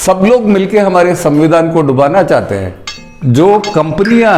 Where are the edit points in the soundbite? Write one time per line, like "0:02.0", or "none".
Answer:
0:02.9